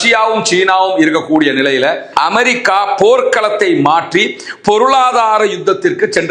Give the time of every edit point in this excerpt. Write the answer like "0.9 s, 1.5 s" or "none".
2.0 s